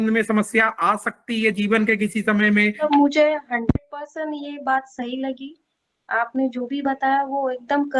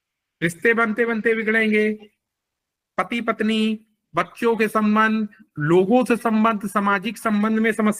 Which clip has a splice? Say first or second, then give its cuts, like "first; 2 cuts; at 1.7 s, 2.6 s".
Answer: first; 1 cut; at 2.8 s